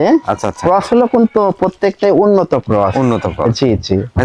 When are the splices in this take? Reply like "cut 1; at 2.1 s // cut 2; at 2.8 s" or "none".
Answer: none